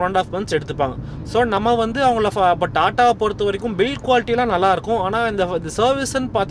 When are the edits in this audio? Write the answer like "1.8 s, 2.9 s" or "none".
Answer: none